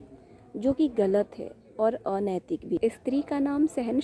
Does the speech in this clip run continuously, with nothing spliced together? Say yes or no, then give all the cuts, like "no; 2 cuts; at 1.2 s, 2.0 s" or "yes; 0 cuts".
no; 1 cut; at 2.8 s